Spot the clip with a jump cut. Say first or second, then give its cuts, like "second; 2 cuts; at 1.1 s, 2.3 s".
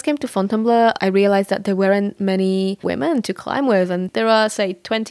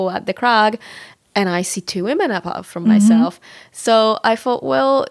first; 3 cuts; at 1.0 s, 2.8 s, 4.1 s